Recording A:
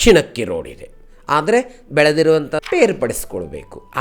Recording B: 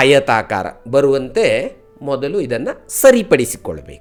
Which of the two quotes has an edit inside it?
A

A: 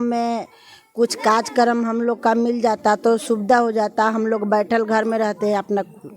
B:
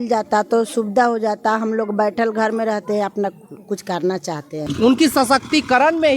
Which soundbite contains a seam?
B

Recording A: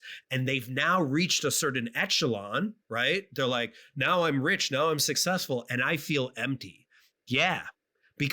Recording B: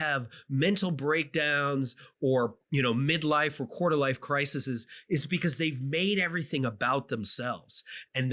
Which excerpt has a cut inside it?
B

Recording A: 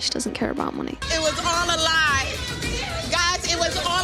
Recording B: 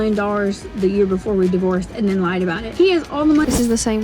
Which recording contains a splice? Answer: B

